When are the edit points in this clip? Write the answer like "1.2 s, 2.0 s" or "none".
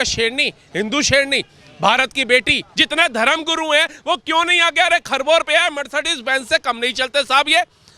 2.6 s